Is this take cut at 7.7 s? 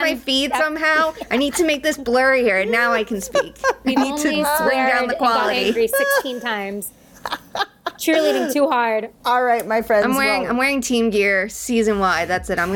no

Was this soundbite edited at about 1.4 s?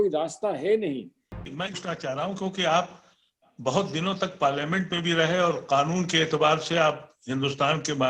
yes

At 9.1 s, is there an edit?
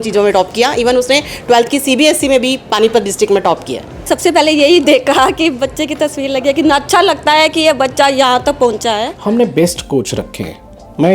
yes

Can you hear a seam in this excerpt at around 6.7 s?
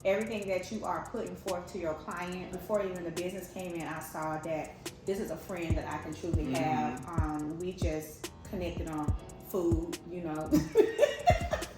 no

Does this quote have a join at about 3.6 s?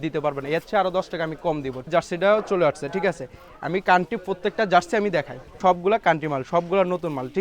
no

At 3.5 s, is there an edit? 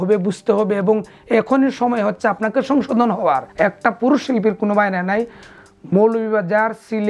yes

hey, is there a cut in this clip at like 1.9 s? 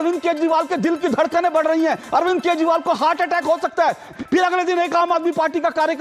no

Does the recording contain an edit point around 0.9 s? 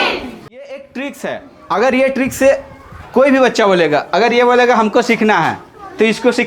yes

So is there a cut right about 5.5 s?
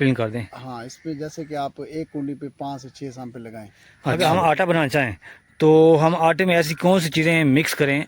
no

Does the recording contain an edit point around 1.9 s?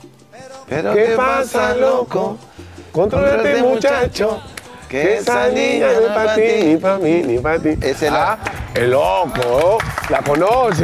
no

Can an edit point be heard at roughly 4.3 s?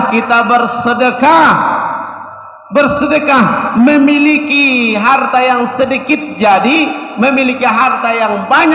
no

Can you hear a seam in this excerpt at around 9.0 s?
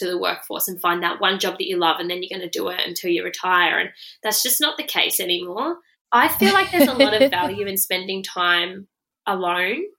no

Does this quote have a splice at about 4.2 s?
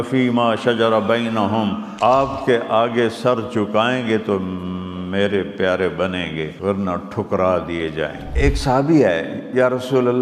no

